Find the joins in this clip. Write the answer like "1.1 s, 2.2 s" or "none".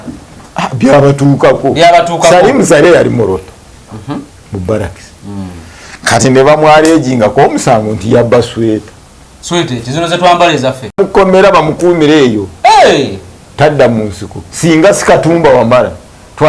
10.8 s